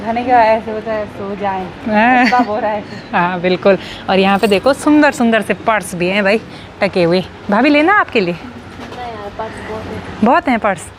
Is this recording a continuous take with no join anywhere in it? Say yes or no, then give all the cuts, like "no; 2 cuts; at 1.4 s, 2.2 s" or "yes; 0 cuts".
yes; 0 cuts